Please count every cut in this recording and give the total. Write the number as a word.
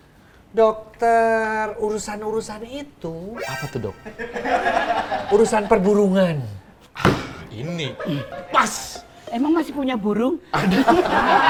zero